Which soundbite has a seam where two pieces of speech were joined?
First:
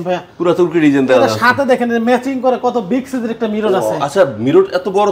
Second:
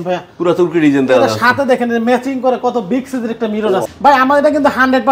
second; 1 cut; at 3.9 s

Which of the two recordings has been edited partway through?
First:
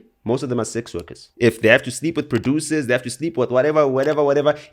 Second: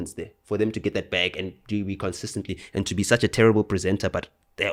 first; 1 cut; at 1.2 s

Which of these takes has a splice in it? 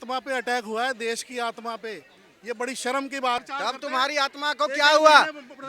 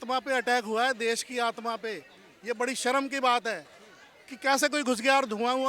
first; 1 cut; at 3.4 s

